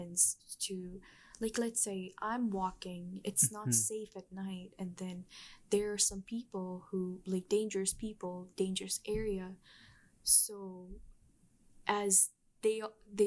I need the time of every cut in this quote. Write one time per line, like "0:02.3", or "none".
none

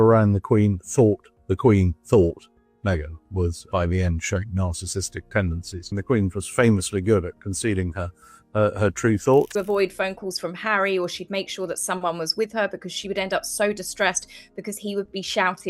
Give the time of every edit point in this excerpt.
0:09.5

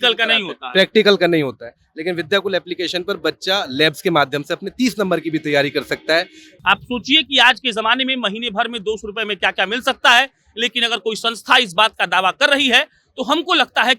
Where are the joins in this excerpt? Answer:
0:06.5

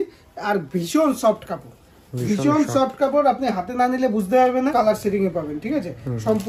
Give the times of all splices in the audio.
0:04.7

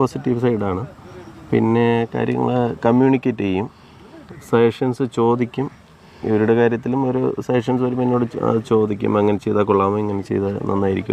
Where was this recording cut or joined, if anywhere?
none

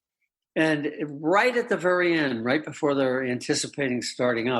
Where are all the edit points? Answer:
none

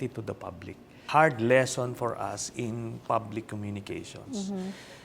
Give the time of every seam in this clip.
0:01.0

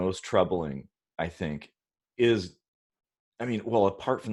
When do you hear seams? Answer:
none

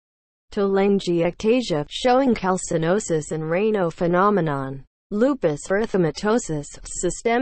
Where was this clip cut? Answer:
0:01.0

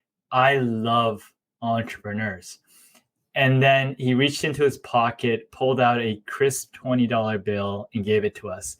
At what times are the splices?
none

